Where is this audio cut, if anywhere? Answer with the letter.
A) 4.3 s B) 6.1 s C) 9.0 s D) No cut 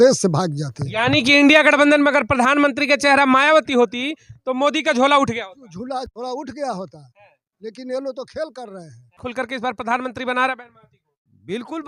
C